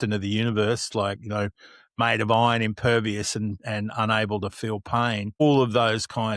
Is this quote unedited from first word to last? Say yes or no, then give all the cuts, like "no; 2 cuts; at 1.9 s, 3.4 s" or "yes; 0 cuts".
no; 1 cut; at 5.4 s